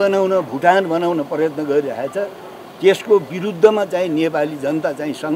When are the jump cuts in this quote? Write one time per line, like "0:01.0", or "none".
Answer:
none